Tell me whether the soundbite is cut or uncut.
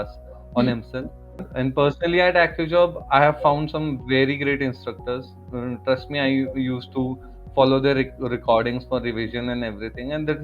cut